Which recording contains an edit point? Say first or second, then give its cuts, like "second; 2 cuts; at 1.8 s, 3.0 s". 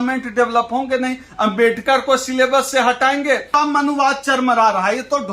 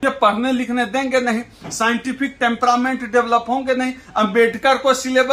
first; 1 cut; at 3.5 s